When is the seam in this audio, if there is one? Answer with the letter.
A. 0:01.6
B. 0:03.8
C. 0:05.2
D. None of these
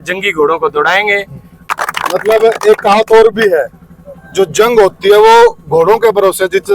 A